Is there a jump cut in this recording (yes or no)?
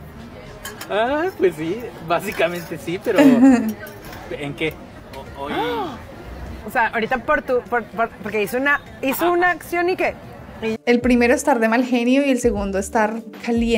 yes